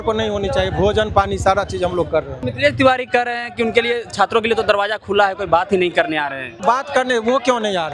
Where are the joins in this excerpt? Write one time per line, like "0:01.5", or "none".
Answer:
0:02.5
0:06.6